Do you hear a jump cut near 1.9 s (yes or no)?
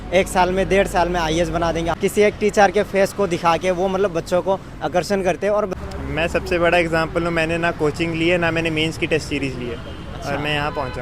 yes